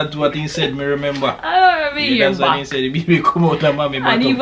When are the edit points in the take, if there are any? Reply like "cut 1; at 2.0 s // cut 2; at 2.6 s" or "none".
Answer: none